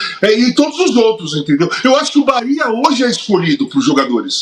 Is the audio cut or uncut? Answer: uncut